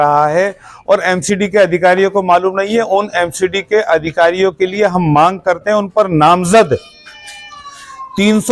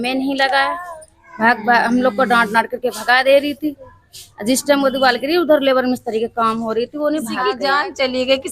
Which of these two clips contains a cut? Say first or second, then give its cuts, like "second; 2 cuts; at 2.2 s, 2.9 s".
second; 1 cut; at 7.5 s